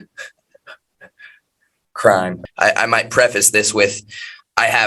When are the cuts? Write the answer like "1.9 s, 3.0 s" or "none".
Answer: 2.4 s